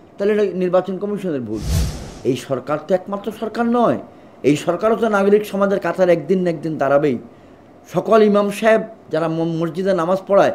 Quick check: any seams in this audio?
yes; 1 cut; at 1.8 s

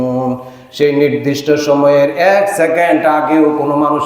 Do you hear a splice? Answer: yes; 1 cut; at 2.5 s

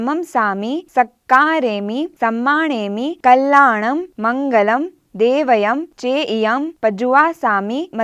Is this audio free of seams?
yes; 0 cuts

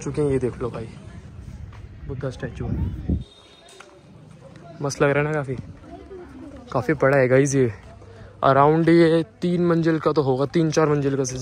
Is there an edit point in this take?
no; 0 cuts

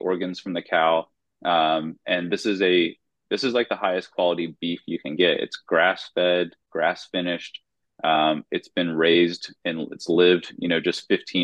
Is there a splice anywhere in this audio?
no; 0 cuts

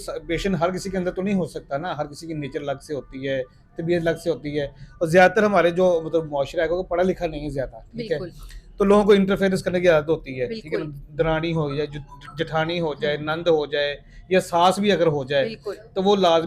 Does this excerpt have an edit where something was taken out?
no; 0 cuts

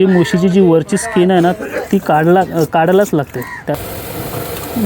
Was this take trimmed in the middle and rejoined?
yes; 1 cut; at 3.8 s

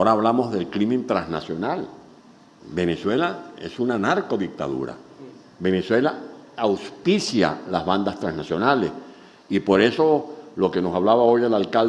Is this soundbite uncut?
yes; 0 cuts

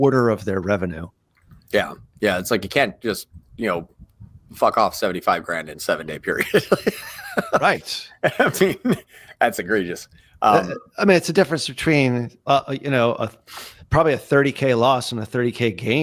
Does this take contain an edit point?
no; 0 cuts

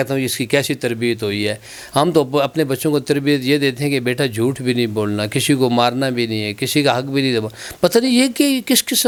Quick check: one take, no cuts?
yes; 0 cuts

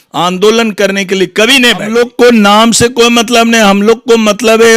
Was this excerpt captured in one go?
no; 1 cut; at 1.9 s

